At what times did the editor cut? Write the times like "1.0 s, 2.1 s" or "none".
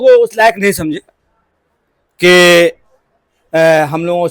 none